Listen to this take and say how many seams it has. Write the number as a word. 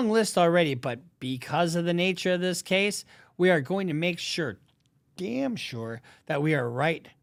zero